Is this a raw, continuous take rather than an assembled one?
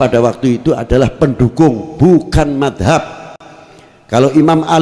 yes; 0 cuts

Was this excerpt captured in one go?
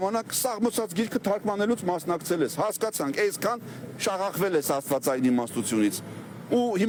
yes; 0 cuts

